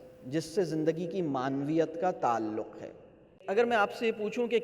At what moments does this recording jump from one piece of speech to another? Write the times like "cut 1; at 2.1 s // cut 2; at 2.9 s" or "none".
cut 1; at 3.4 s